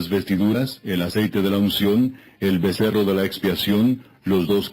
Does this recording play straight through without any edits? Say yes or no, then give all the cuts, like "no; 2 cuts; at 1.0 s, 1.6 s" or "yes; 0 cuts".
no; 1 cut; at 1.8 s